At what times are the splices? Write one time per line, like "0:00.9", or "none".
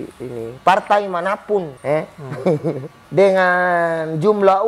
0:01.7
0:02.9